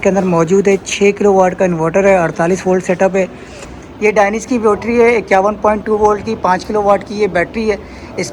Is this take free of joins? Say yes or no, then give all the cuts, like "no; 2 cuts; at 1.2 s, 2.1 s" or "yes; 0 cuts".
no; 1 cut; at 3.5 s